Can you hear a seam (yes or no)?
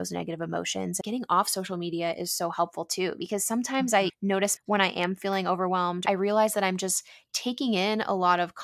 yes